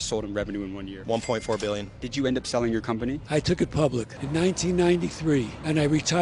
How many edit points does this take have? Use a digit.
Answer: 2